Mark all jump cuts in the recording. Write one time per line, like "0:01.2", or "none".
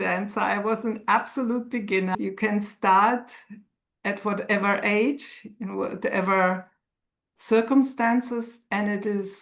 0:02.1